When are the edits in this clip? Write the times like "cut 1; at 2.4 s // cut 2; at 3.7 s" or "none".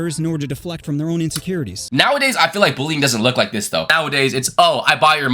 cut 1; at 1.8 s // cut 2; at 3.9 s